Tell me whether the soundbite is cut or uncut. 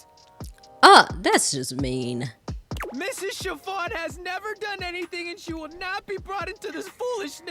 uncut